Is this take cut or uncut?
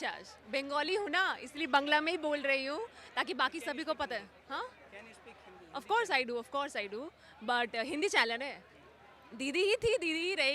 uncut